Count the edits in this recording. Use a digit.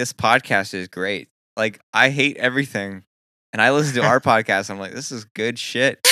1